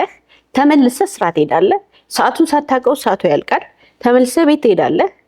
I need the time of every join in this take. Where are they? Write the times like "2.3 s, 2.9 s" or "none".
none